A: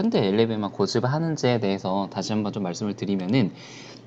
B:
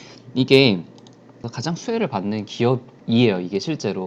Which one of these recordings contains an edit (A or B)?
B